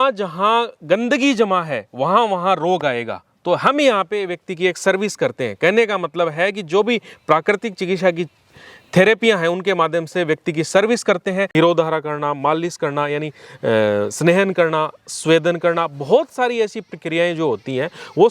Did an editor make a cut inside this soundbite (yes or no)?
yes